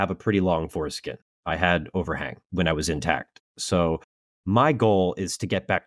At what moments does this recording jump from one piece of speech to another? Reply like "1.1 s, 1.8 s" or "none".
2.3 s